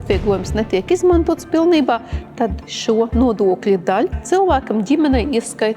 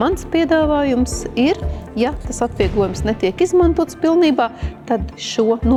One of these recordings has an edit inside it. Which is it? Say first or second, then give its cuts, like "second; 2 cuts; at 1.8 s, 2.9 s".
first; 1 cut; at 4.2 s